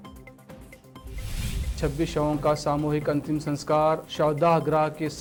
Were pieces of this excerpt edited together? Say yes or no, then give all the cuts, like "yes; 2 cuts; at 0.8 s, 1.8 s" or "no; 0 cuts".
no; 0 cuts